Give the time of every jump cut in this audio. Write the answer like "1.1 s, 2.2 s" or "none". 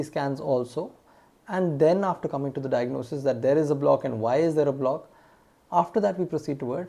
none